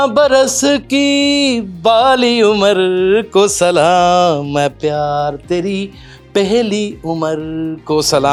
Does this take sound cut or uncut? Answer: uncut